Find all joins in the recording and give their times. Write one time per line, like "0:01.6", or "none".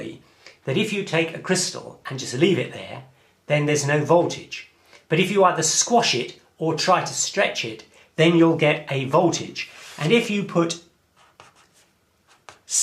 0:09.9